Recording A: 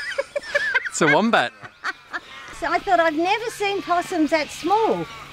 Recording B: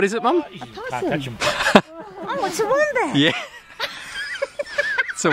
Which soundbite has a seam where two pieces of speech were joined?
A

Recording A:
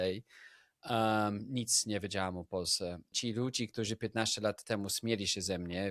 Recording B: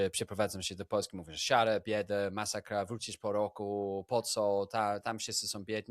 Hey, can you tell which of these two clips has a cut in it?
A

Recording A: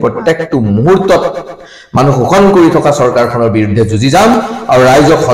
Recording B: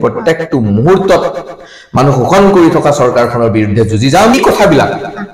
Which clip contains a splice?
B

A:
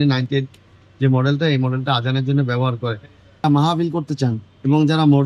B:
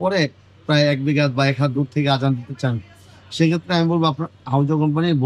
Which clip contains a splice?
A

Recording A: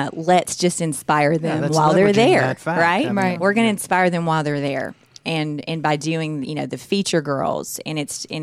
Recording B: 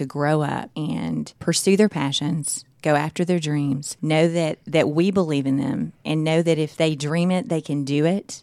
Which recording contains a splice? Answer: B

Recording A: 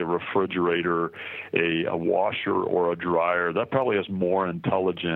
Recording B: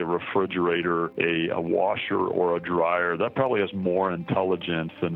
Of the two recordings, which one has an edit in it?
B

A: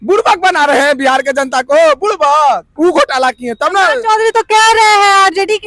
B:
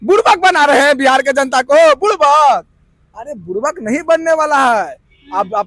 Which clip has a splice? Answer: A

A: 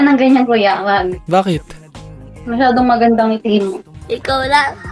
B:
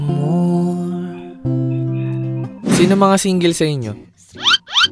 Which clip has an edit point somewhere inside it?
B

